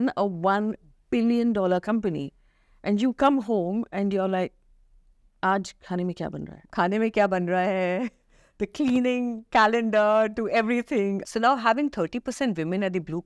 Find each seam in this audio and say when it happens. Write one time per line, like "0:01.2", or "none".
0:06.6
0:11.2